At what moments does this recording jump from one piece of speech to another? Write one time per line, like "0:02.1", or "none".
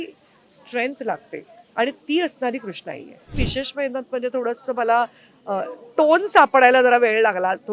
0:03.3